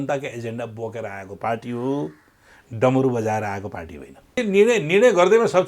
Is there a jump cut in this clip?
yes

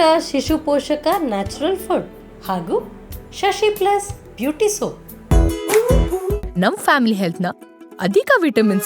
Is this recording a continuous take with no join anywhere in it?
no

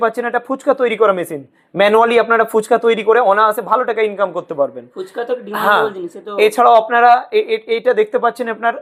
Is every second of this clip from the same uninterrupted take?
yes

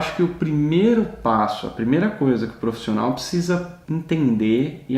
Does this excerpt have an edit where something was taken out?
yes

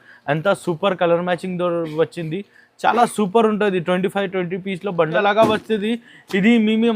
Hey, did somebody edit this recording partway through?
yes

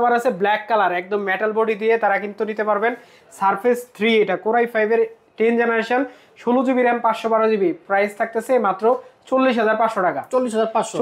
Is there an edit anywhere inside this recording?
no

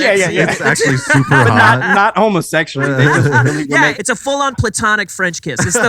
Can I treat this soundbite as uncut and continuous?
no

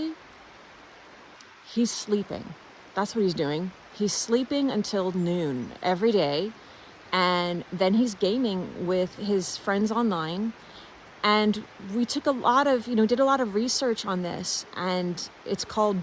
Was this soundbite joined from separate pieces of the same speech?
no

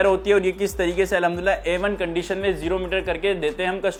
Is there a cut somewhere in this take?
no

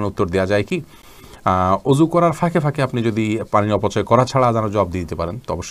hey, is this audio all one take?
yes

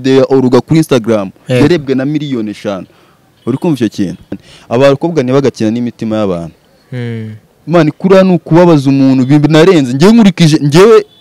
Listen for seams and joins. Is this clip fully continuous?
no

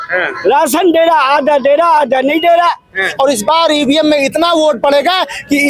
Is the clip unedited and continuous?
no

